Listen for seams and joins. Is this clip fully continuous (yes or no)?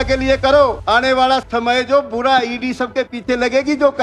no